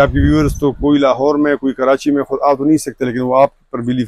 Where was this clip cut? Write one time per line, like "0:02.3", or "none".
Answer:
none

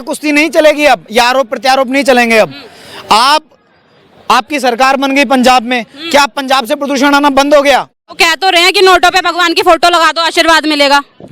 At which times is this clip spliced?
0:08.2

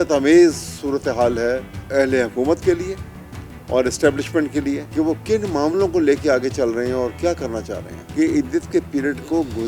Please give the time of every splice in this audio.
0:01.7
0:04.8

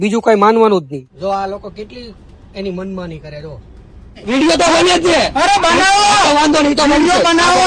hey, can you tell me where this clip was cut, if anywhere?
0:01.0
0:04.2

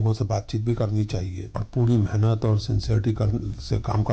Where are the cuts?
0:01.6

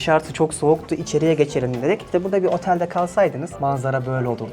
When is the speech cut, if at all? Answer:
0:02.0
0:03.5

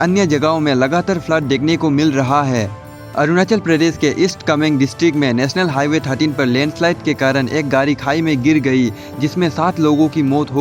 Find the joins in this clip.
none

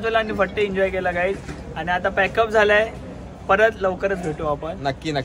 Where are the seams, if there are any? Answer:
none

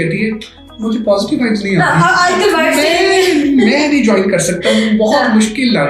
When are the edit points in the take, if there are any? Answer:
none

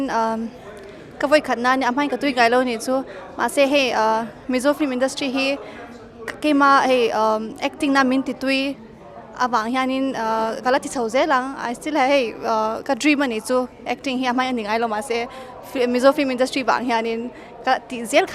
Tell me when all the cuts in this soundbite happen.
none

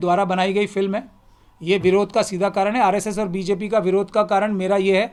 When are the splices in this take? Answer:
none

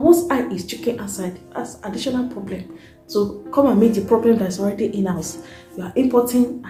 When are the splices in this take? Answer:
none

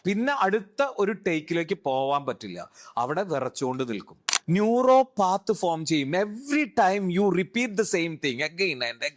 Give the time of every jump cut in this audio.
0:04.3

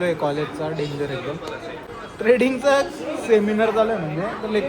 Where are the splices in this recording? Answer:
0:01.8

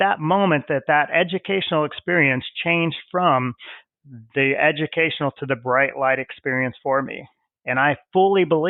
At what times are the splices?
none

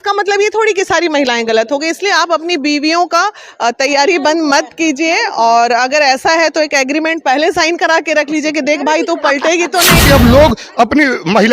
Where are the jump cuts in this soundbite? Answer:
0:10.0

